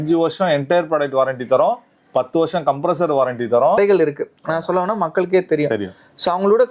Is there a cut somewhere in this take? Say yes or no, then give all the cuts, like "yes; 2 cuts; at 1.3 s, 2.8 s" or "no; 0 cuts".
yes; 1 cut; at 3.8 s